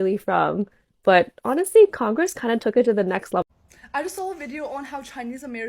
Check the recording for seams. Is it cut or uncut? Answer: cut